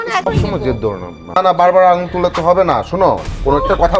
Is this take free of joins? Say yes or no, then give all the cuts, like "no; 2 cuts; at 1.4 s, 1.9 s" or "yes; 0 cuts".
no; 1 cut; at 1.4 s